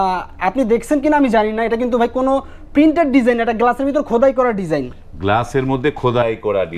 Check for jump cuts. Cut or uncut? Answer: uncut